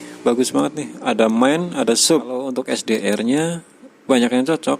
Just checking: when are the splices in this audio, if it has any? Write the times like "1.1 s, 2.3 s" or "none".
2.6 s